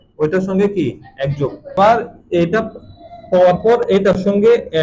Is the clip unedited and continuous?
no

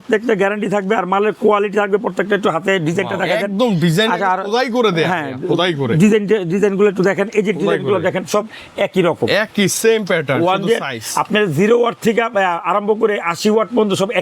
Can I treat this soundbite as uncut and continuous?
yes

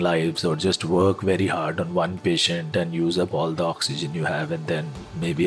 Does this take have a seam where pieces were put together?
no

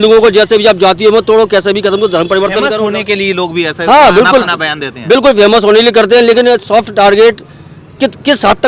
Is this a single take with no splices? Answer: no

